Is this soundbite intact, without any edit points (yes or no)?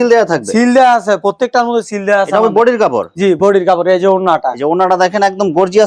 yes